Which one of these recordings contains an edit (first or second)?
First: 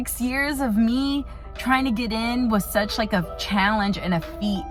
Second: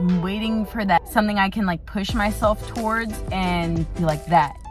second